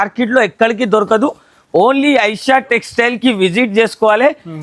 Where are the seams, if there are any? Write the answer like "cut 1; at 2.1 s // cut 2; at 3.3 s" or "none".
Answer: none